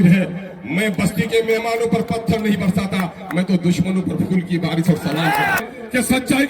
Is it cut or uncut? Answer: cut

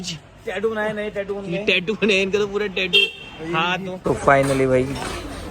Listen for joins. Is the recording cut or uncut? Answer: cut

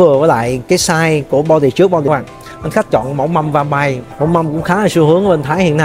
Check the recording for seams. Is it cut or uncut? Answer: cut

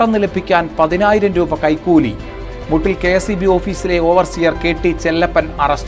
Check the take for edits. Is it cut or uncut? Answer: uncut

